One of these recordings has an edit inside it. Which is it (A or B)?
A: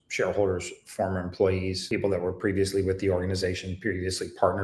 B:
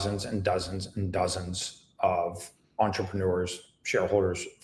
A